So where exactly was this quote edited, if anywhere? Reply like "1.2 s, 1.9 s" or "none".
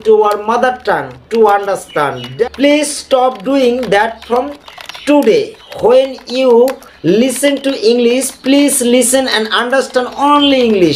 none